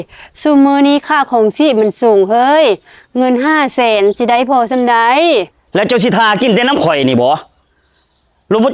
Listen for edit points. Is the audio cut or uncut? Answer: cut